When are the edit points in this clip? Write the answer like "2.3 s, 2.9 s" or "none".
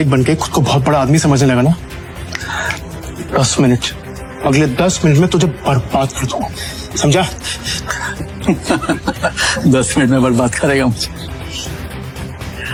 none